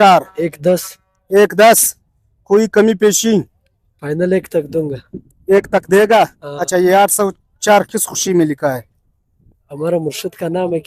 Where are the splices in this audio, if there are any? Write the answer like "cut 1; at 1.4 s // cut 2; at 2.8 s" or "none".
none